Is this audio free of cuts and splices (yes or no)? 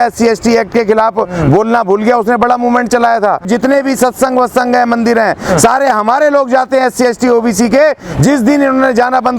no